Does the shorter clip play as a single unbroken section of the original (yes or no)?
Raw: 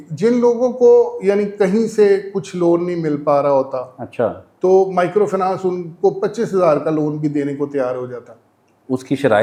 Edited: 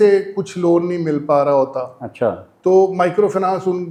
yes